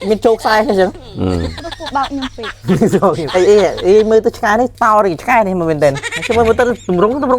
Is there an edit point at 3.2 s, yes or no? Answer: yes